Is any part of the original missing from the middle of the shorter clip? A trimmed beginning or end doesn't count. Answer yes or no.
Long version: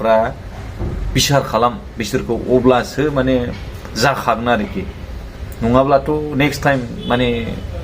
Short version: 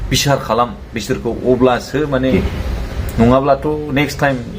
yes